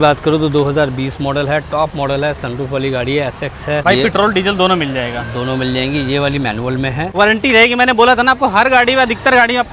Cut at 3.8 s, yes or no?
yes